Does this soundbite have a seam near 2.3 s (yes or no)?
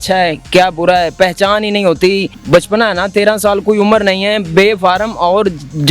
yes